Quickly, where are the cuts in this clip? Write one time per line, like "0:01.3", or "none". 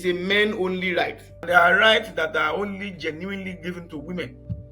0:01.3